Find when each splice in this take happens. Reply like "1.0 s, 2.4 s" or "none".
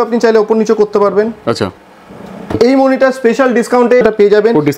2.5 s, 4.0 s

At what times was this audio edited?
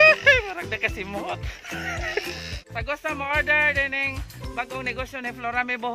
2.6 s

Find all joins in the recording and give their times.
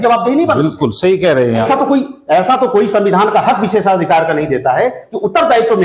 1.7 s

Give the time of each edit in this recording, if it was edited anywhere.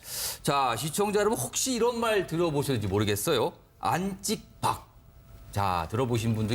none

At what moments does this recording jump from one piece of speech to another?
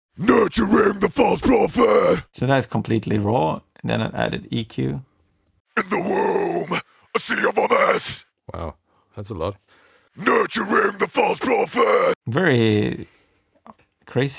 none

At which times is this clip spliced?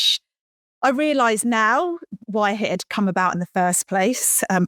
none

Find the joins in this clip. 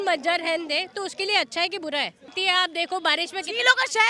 2.3 s

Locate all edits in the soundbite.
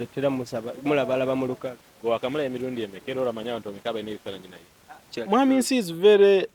5.2 s

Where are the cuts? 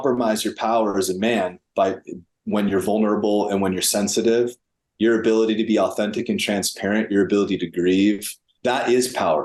none

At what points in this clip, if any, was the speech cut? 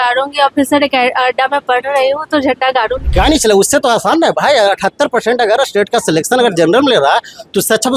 3.0 s

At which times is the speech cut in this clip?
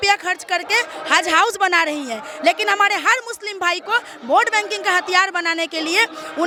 none

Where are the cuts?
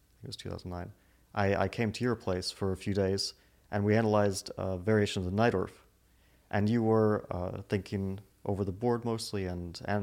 none

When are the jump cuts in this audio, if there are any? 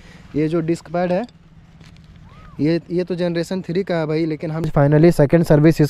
4.7 s

